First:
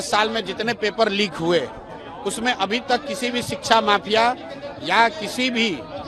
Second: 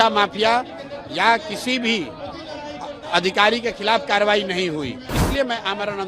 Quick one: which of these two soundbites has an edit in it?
second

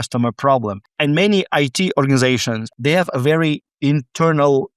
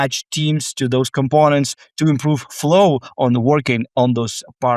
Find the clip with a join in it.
first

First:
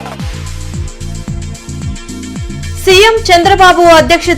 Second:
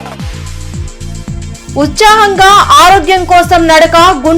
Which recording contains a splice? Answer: first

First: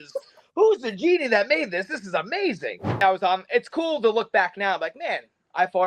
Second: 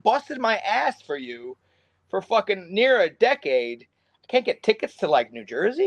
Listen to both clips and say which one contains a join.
first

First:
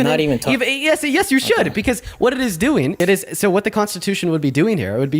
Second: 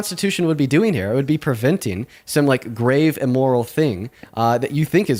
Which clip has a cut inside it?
first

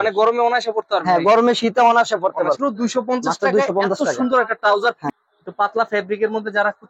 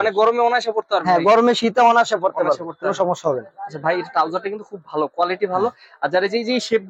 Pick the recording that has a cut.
first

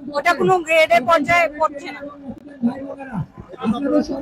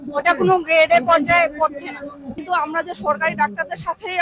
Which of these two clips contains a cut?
second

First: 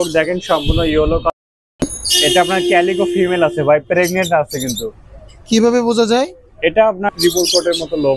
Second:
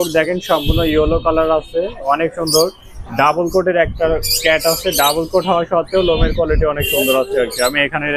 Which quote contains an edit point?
first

